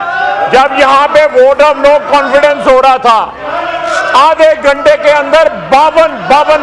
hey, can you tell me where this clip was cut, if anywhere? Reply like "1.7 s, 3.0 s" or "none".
none